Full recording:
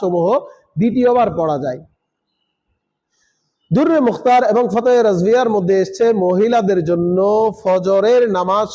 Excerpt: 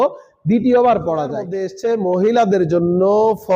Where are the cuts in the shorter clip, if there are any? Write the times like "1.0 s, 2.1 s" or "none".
1.7 s